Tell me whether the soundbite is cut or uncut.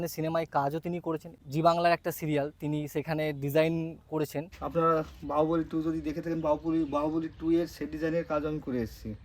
cut